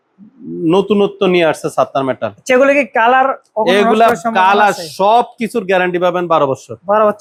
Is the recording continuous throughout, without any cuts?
yes; 0 cuts

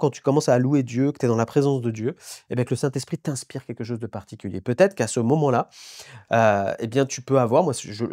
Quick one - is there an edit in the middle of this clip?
no; 0 cuts

